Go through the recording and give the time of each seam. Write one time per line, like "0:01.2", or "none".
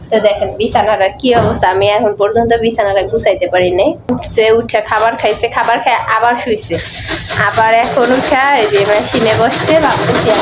0:04.2